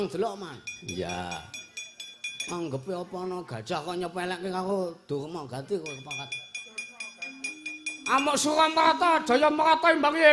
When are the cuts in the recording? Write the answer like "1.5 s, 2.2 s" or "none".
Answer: none

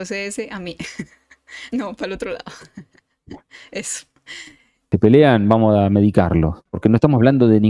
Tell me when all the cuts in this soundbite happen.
4.8 s, 6.6 s

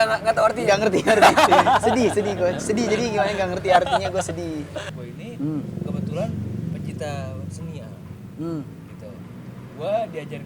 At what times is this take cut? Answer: 5.0 s

